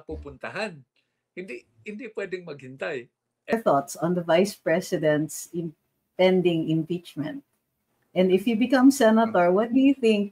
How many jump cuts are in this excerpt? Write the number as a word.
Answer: one